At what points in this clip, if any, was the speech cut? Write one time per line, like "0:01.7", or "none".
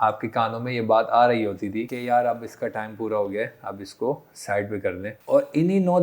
0:01.9
0:05.1